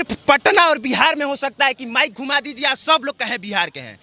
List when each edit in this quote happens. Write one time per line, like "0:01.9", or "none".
none